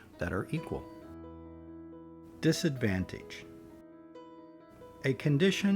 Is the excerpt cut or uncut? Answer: cut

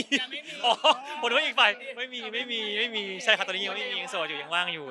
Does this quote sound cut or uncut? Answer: uncut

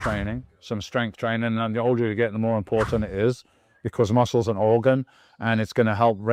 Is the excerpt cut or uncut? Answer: uncut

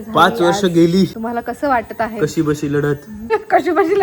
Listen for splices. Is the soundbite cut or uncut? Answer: cut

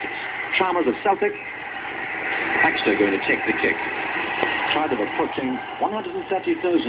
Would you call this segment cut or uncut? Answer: uncut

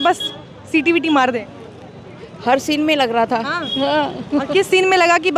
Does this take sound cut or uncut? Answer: uncut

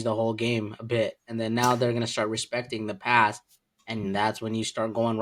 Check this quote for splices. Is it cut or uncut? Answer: uncut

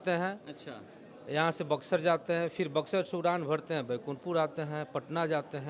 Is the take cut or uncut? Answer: uncut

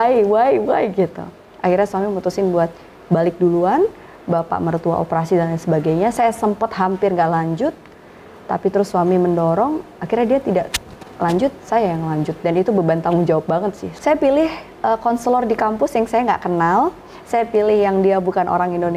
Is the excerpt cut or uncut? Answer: cut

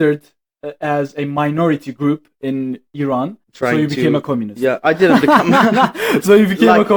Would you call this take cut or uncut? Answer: cut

